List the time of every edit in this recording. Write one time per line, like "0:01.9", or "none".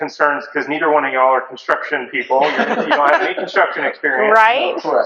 none